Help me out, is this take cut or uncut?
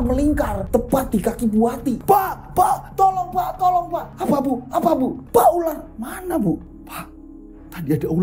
cut